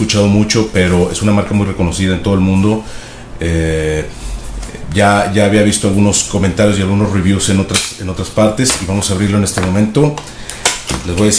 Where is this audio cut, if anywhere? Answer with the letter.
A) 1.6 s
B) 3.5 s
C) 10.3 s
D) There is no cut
B